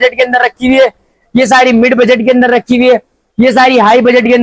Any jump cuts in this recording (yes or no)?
no